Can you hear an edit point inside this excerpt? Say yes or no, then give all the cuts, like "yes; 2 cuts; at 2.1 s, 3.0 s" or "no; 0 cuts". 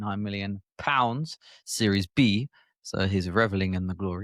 no; 0 cuts